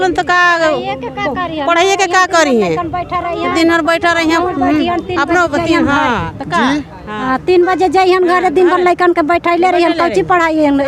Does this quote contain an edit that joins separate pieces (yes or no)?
no